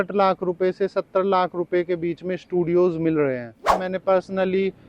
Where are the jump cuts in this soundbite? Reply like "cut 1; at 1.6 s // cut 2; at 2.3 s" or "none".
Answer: cut 1; at 3.8 s